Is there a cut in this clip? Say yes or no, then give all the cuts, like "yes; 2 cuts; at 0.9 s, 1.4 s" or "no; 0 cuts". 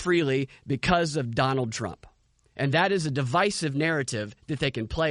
no; 0 cuts